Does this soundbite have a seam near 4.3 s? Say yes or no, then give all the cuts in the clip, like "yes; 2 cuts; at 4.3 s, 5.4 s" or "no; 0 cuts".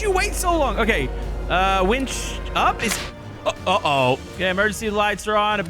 yes; 1 cut; at 4.3 s